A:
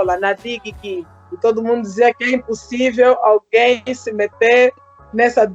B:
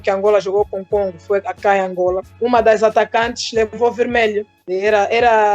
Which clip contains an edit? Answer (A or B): B